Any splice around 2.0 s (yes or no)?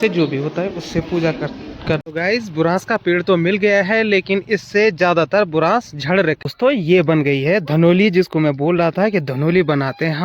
yes